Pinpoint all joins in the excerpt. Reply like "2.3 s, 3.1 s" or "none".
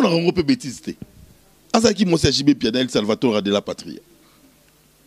none